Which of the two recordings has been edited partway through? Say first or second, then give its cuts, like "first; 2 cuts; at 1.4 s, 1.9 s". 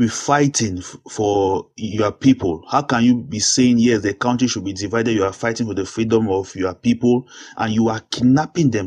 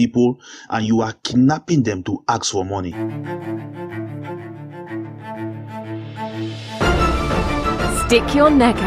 second; 1 cut; at 2.9 s